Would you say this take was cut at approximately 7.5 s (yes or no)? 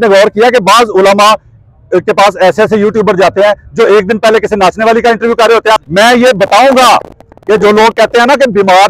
no